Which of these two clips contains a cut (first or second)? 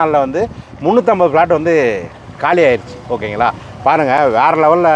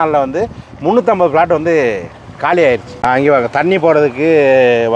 second